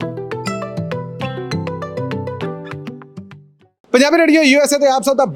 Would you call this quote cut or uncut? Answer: uncut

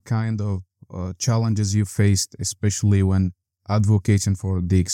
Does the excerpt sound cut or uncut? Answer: uncut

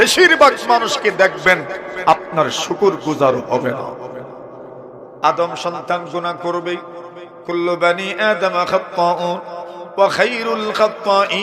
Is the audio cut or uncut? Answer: cut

